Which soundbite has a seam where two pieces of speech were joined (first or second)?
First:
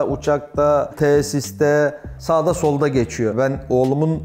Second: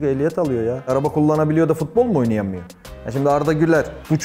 first